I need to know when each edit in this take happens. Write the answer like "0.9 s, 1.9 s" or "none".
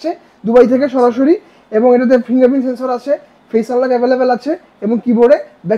none

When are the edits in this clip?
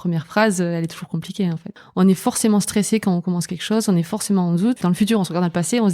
1.6 s, 4.8 s

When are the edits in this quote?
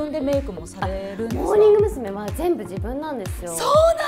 none

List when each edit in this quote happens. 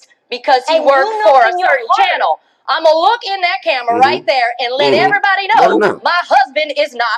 none

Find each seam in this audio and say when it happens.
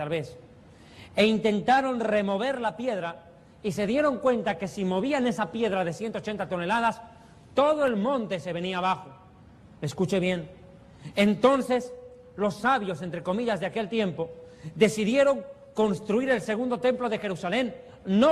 none

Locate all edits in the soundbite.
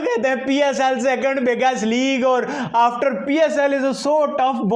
none

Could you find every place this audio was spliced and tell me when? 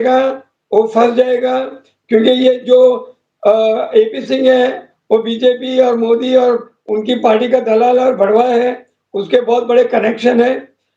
none

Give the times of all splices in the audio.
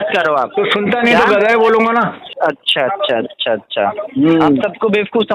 2.2 s

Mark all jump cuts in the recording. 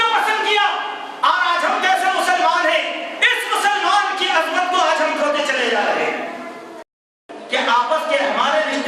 7.2 s

